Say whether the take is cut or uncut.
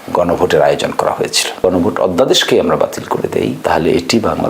cut